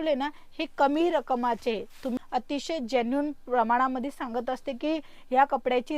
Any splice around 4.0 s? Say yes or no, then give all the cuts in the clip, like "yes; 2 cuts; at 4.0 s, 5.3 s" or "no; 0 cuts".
no; 1 cut; at 2.2 s